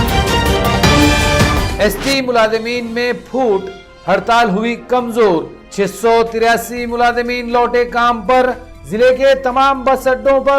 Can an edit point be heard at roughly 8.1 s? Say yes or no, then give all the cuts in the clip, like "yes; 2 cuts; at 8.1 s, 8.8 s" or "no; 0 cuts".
no; 1 cut; at 1.7 s